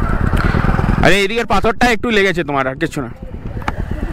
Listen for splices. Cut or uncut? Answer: uncut